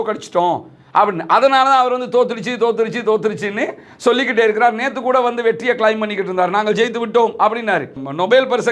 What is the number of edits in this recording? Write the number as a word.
zero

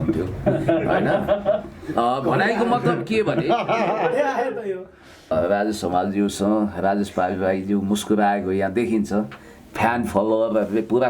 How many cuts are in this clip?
one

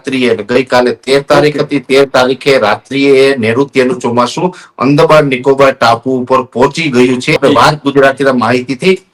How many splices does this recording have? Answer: one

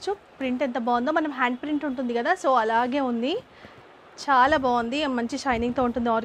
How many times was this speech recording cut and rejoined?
zero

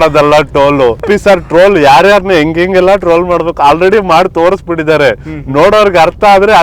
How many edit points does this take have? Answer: one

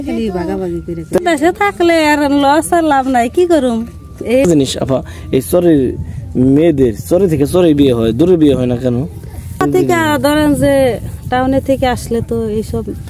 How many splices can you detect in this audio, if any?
three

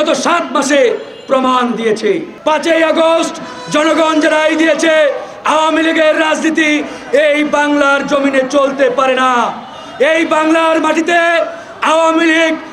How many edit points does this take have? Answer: one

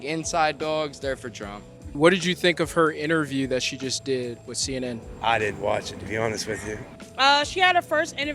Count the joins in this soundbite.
two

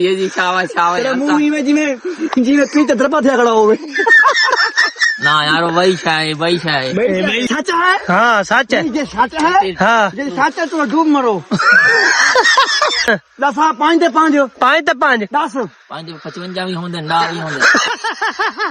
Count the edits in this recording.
two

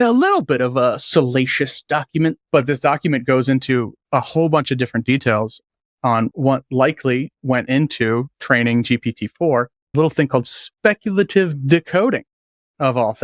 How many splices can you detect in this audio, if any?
three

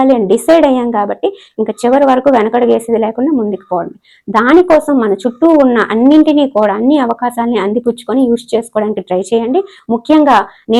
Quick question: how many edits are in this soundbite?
zero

